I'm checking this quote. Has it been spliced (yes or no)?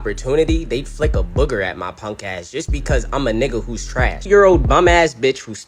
yes